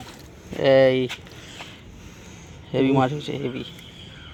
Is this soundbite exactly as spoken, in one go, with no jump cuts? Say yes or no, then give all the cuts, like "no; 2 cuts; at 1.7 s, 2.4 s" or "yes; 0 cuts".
yes; 0 cuts